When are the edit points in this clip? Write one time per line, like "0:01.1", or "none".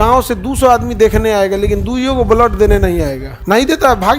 0:03.3